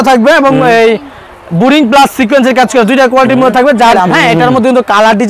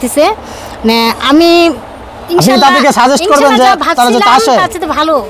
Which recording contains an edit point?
first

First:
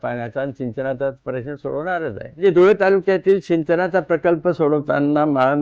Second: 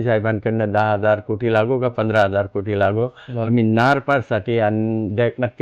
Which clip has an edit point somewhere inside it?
first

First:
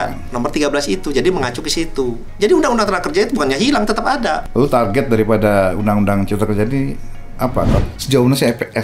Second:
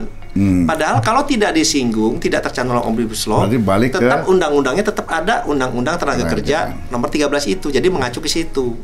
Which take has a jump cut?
first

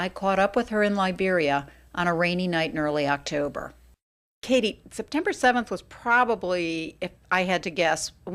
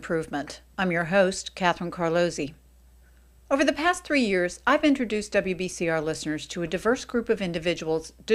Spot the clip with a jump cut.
first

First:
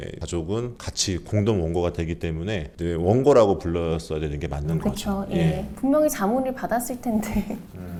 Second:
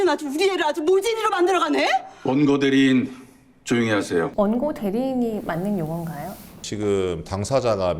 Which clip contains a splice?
second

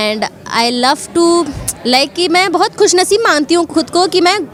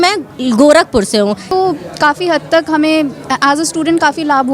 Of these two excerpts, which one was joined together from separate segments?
second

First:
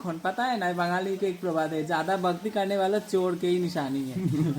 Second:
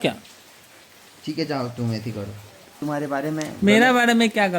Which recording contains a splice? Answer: second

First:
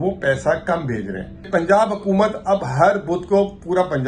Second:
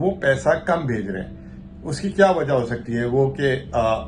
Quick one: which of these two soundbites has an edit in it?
first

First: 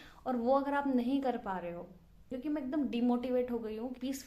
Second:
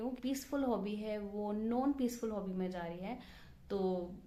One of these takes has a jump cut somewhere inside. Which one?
first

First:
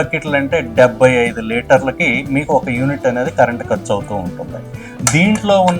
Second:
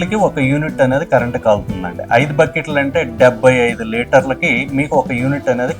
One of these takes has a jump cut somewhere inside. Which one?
first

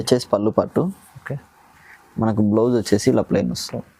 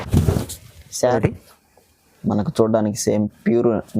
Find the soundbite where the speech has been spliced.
second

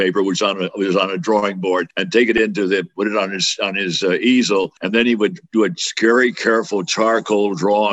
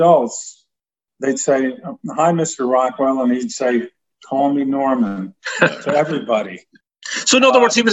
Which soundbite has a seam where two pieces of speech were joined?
first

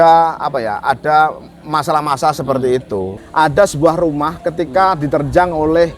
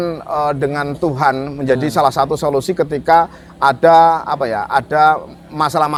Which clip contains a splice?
first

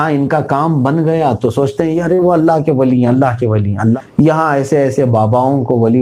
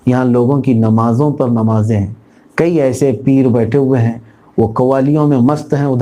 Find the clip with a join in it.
first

